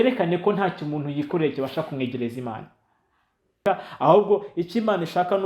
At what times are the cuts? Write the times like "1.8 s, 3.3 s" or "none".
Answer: 3.6 s